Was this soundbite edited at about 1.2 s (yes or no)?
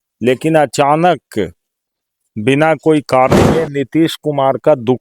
no